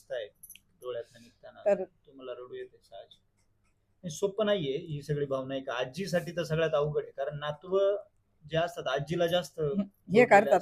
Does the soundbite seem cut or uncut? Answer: uncut